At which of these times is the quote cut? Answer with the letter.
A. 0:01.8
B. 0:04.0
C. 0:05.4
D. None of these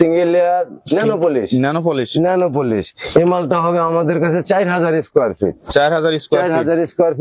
D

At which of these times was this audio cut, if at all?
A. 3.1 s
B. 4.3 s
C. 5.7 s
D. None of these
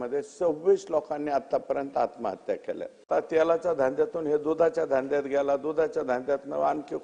A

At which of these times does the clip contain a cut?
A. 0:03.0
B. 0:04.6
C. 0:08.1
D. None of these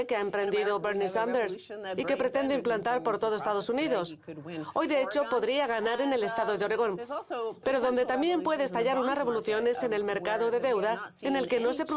C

